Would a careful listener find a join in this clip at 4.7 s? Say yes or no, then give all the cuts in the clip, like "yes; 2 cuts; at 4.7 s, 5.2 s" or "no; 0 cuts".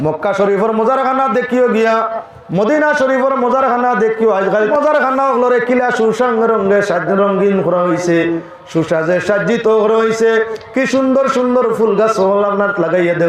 yes; 1 cut; at 4.7 s